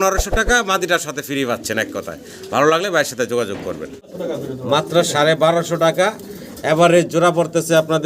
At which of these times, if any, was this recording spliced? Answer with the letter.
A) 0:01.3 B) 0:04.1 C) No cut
B